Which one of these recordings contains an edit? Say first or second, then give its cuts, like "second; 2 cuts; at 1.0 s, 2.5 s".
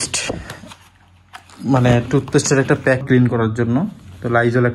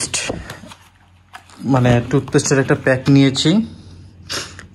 first; 1 cut; at 3.0 s